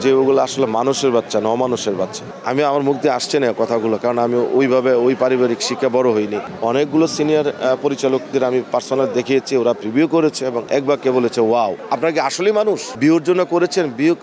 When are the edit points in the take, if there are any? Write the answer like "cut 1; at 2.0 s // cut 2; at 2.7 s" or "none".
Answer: cut 1; at 2.3 s // cut 2; at 6.4 s // cut 3; at 10.6 s // cut 4; at 11.8 s // cut 5; at 12.9 s